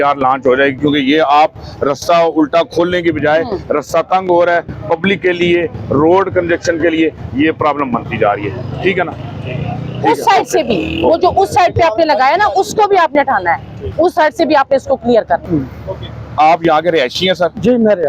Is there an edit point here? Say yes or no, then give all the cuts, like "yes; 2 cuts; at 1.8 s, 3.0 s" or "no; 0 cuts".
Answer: no; 0 cuts